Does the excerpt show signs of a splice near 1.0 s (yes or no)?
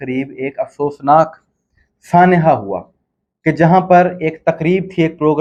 no